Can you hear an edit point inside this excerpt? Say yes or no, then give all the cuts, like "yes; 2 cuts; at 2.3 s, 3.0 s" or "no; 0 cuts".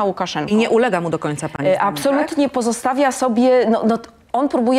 no; 0 cuts